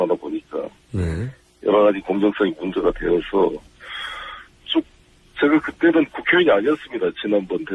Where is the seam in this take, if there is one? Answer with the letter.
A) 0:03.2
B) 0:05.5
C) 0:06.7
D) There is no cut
B